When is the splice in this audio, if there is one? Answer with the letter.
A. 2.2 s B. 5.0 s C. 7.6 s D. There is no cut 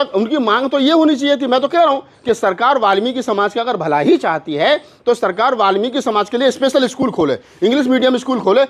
D